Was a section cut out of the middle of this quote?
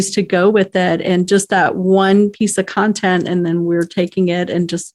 no; 0 cuts

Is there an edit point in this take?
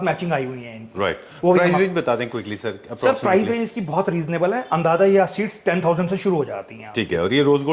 no; 0 cuts

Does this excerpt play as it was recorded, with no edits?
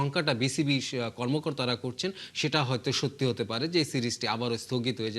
yes; 0 cuts

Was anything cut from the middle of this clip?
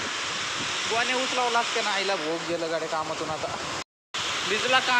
yes; 1 cut; at 3.9 s

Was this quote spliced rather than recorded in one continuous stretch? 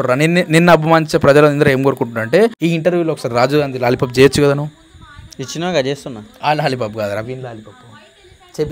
yes; 1 cut; at 2.6 s

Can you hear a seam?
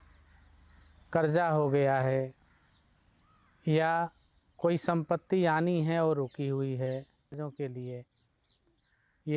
yes; 1 cut; at 7.4 s

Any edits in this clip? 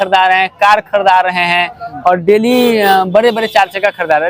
no; 0 cuts

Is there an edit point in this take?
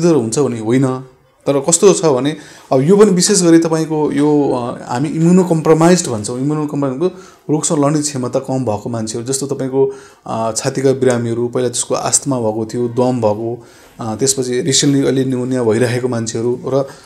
no; 0 cuts

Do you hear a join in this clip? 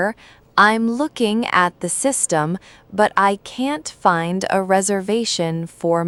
no; 0 cuts

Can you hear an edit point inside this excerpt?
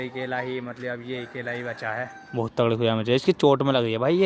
yes; 1 cut; at 2.2 s

